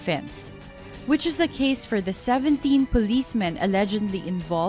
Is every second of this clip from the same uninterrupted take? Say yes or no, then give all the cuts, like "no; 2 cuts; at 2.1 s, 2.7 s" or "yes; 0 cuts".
yes; 0 cuts